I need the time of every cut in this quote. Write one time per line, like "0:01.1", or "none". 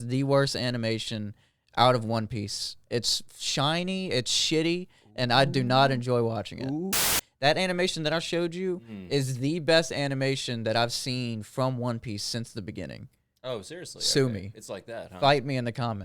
0:07.0